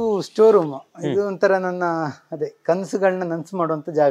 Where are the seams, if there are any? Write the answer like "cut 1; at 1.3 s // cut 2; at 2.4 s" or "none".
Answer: none